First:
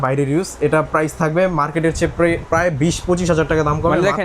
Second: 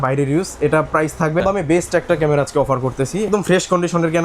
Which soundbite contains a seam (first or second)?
second